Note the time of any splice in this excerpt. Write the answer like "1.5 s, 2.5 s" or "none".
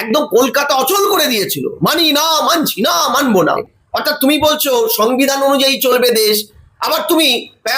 3.4 s